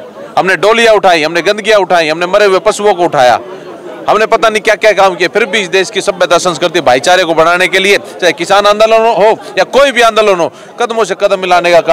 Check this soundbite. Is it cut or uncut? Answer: uncut